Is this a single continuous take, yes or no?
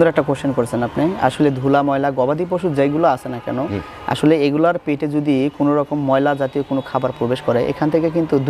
yes